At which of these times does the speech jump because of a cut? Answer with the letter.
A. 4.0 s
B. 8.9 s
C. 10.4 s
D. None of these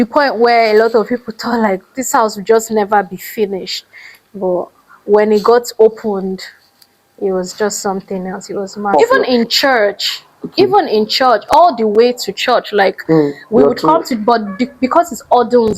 B